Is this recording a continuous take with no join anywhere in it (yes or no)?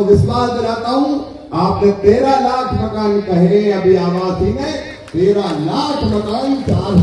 yes